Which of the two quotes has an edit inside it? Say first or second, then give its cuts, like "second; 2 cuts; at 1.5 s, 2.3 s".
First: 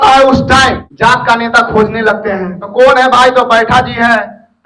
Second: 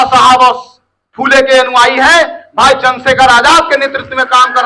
first; 2 cuts; at 0.9 s, 2.6 s